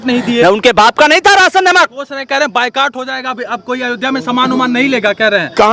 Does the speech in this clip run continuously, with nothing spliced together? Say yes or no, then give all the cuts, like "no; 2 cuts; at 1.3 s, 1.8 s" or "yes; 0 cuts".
no; 1 cut; at 2.0 s